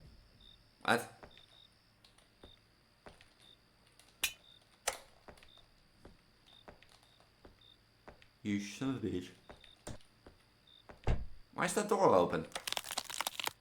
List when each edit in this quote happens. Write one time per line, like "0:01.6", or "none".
none